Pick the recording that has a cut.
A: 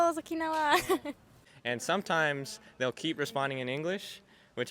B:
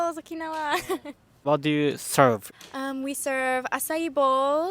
A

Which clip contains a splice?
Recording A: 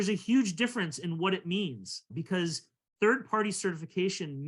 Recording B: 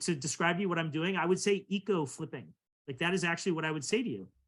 A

